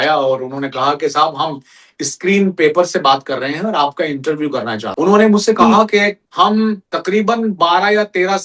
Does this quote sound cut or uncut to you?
cut